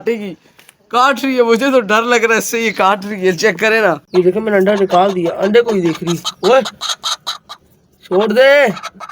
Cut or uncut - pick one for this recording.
cut